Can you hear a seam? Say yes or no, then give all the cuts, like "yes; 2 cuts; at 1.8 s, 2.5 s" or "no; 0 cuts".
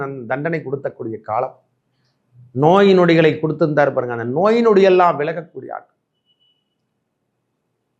no; 0 cuts